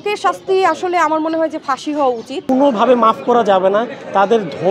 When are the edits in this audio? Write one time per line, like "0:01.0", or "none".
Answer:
0:02.4